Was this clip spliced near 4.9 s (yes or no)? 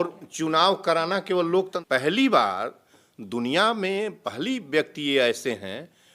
no